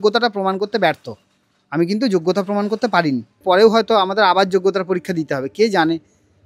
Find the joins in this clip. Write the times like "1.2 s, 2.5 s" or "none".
3.4 s